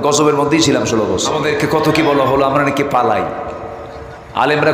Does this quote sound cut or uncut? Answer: cut